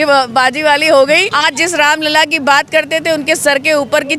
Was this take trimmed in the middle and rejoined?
yes; 1 cut; at 1.3 s

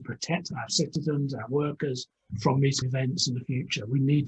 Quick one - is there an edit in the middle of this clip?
yes; 1 cut; at 2.8 s

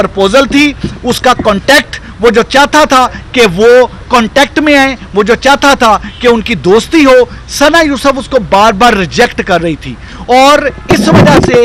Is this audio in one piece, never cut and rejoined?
yes; 0 cuts

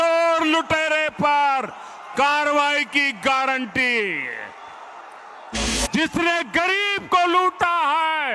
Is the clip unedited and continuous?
no; 1 cut; at 5.7 s

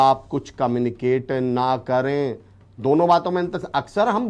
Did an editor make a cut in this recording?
no; 0 cuts

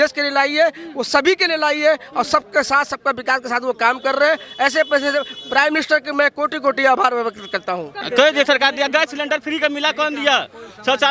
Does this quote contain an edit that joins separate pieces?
yes; 1 cut; at 8.0 s

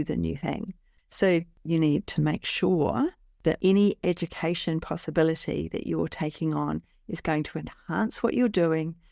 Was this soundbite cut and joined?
yes; 1 cut; at 0.9 s

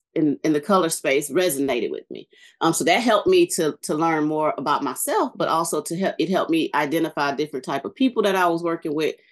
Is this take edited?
no; 0 cuts

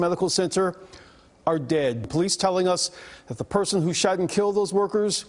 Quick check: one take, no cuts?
no; 1 cut; at 2.1 s

